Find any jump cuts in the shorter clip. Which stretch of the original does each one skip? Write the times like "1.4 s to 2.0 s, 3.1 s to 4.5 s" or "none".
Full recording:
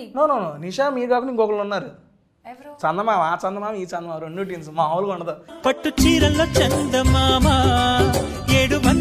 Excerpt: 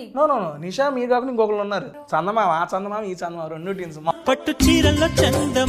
1.9 s to 2.7 s, 4.8 s to 5.5 s

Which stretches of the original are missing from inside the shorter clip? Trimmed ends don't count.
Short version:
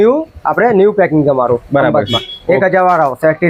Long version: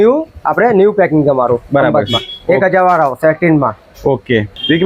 none

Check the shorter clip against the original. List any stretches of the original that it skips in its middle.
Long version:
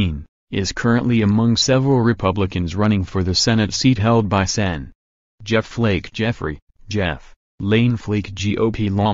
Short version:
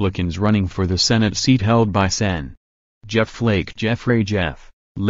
6.4 s to 6.6 s

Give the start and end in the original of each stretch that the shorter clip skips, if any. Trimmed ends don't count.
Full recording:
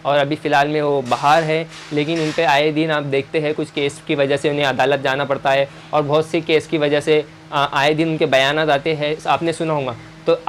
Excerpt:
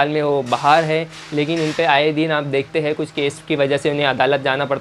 none

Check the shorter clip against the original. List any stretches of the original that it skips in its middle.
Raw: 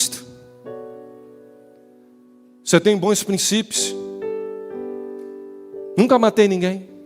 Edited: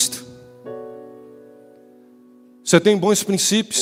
none

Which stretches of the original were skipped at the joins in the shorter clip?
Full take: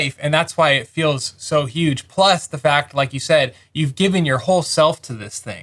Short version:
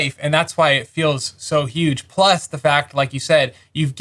none

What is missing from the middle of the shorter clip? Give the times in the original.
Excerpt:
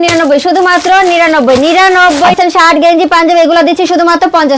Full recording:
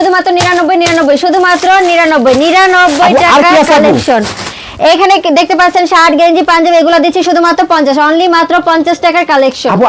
3.1 s to 5.7 s

